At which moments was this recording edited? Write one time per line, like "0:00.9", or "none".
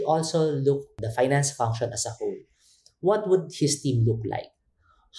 0:01.0